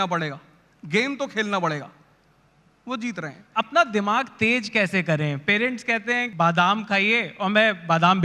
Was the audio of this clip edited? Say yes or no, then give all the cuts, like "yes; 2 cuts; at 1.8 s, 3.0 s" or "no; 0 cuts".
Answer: yes; 2 cuts; at 3.4 s, 6.3 s